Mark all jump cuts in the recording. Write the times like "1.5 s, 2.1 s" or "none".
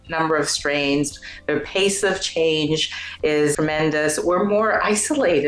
3.6 s